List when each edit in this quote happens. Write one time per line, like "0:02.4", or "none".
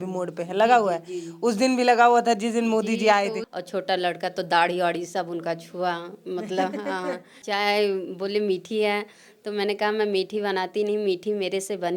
0:03.4
0:07.4